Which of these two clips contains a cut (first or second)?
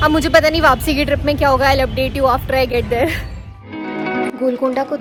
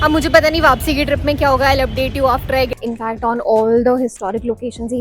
second